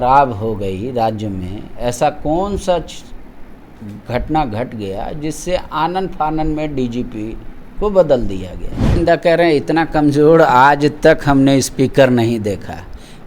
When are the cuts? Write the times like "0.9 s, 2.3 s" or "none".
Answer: 9.0 s